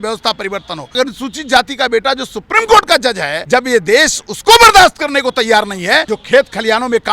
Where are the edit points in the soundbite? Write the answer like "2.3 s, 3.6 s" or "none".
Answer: 0.9 s, 3.3 s, 6.1 s